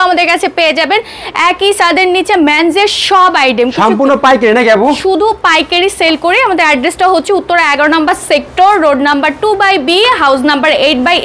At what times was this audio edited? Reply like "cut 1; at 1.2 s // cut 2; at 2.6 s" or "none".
none